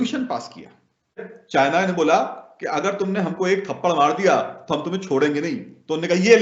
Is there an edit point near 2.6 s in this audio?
no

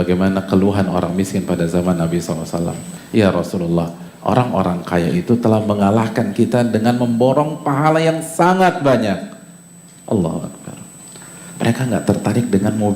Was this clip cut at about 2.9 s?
yes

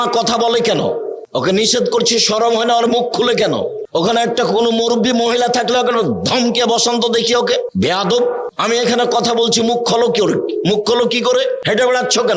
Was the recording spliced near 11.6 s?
yes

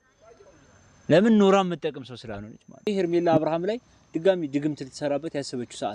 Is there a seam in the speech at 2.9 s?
yes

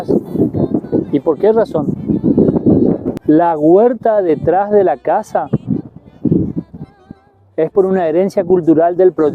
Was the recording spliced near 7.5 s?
no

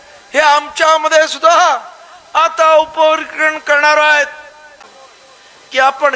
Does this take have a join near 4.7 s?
yes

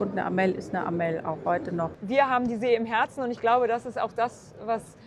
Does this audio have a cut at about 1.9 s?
yes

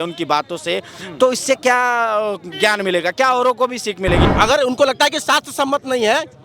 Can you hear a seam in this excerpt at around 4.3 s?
yes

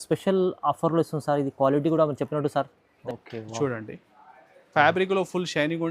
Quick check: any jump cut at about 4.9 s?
no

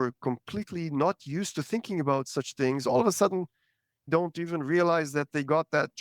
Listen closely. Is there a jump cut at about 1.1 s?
no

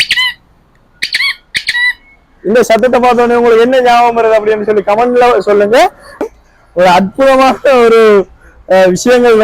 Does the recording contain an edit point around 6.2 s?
yes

